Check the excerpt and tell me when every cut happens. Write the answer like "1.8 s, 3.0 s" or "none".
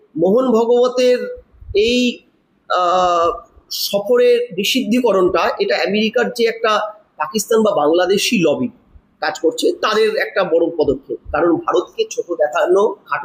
none